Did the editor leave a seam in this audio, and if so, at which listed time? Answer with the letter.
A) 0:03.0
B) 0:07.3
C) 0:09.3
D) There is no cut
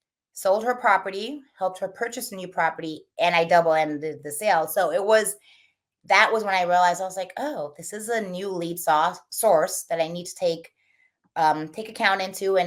D